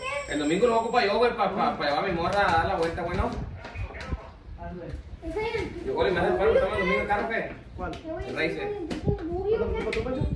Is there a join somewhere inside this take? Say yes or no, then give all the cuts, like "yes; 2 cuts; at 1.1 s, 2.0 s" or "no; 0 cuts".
no; 0 cuts